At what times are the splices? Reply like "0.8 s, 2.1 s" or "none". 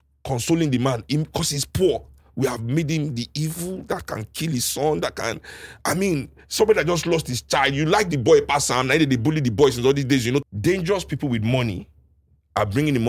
10.4 s